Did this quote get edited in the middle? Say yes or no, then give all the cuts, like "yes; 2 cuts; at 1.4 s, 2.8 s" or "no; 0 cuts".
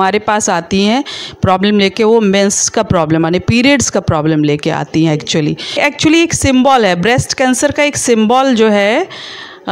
yes; 1 cut; at 5.8 s